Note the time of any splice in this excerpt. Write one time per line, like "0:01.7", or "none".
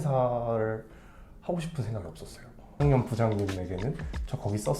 0:02.7